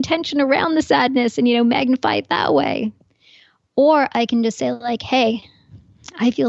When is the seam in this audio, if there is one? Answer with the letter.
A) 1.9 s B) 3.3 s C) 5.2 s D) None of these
D